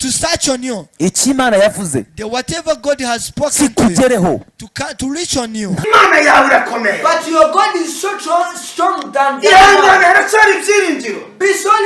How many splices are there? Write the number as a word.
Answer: one